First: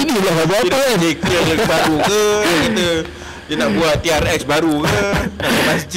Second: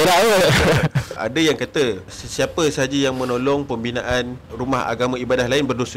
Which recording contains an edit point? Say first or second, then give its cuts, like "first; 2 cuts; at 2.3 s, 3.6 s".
second; 3 cuts; at 1.2 s, 2.2 s, 4.5 s